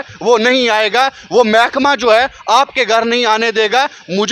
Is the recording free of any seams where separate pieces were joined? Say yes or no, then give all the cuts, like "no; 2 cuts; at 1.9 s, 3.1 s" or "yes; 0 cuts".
yes; 0 cuts